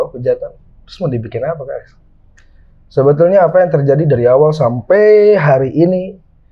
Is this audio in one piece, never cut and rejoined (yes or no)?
no